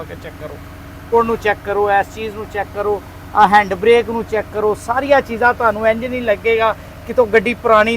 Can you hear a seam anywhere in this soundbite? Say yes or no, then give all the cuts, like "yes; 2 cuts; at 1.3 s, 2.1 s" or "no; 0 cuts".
yes; 1 cut; at 1.1 s